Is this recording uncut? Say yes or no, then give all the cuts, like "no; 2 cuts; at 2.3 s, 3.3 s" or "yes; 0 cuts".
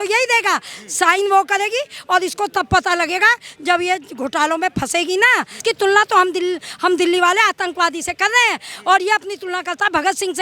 no; 1 cut; at 5.6 s